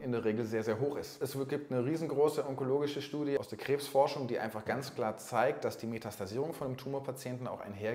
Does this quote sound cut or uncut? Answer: cut